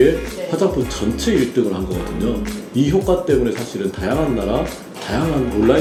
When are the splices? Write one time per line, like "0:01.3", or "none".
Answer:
none